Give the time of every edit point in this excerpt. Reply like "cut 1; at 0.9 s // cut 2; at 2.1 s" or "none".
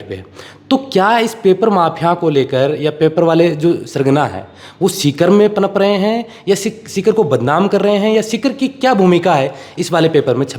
none

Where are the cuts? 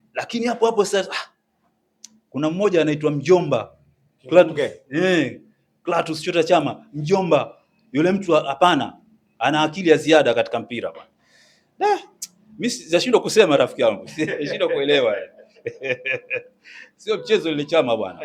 none

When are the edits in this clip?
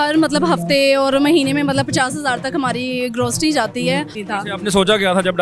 cut 1; at 4.2 s

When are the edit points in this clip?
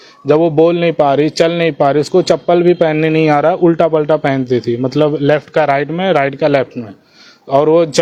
none

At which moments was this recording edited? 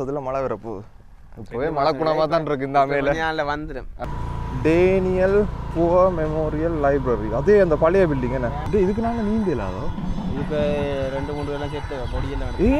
cut 1; at 3.9 s // cut 2; at 8.6 s

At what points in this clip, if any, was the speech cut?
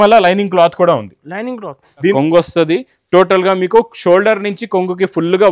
cut 1; at 2.1 s

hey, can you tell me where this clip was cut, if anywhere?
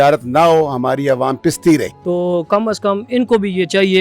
cut 1; at 1.9 s

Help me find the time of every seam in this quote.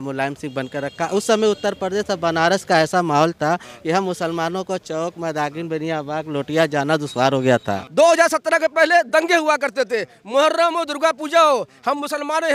cut 1; at 7.8 s

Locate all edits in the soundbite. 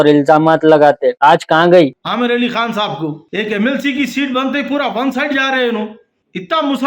cut 1; at 1.9 s

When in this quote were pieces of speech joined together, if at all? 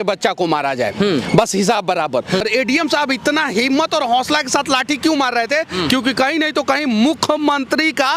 cut 1; at 2.4 s

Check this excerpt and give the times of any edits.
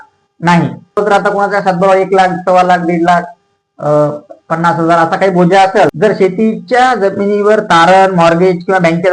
cut 1; at 1.0 s // cut 2; at 5.9 s

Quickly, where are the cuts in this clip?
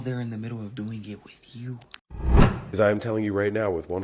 cut 1; at 2.4 s

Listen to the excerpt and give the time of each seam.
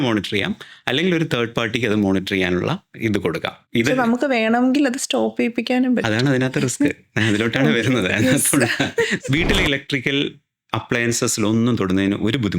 cut 1; at 3.6 s // cut 2; at 9.2 s

